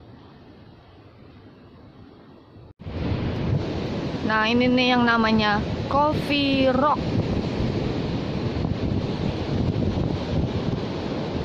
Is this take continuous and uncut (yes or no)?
no